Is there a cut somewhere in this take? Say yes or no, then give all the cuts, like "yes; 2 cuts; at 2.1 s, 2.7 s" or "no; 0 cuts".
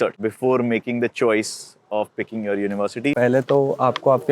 yes; 1 cut; at 3.2 s